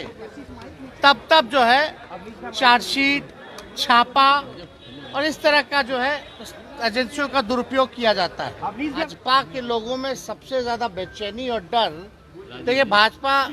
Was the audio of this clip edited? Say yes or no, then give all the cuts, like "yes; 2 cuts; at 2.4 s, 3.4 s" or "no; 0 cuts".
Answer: yes; 1 cut; at 9.0 s